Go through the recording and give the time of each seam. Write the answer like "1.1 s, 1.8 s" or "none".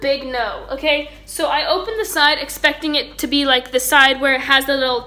none